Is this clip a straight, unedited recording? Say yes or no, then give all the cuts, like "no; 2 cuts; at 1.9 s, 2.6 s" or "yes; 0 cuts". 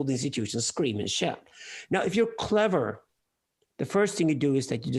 yes; 0 cuts